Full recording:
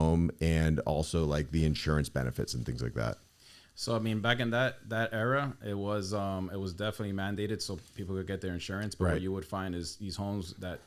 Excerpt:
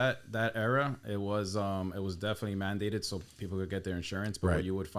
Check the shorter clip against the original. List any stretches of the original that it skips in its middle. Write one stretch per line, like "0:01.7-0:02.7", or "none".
none